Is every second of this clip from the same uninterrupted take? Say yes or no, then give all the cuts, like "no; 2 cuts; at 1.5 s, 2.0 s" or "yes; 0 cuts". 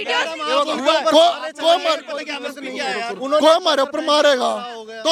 yes; 0 cuts